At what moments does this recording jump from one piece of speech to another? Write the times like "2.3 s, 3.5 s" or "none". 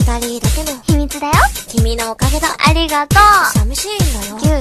none